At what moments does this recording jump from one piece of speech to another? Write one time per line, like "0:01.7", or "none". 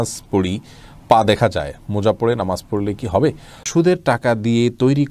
0:03.6